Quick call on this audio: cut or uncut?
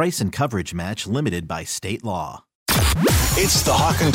cut